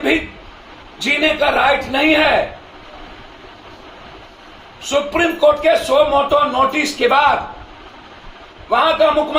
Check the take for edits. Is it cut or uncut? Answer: uncut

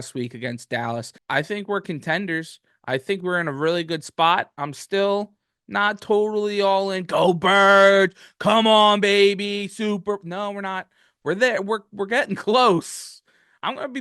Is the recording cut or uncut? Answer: cut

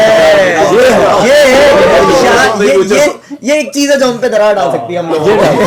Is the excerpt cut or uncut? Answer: uncut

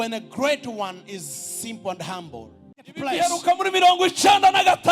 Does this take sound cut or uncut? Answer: cut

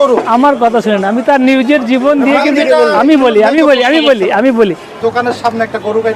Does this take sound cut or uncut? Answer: cut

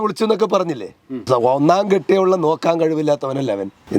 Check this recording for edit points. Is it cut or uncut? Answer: cut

